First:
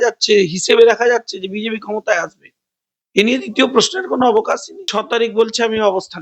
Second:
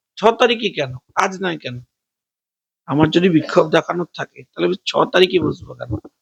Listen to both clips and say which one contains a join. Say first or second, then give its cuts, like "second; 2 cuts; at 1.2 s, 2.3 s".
first; 1 cut; at 4.9 s